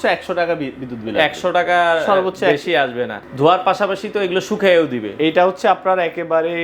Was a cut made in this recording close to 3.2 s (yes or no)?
yes